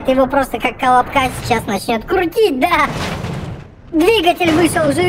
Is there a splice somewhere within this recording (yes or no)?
yes